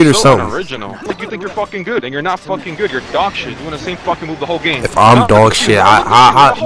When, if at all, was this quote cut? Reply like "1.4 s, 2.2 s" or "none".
1.1 s, 4.8 s